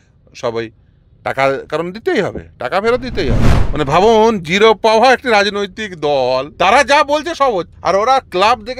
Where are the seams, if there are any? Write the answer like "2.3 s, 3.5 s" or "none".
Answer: 3.5 s, 6.5 s, 7.7 s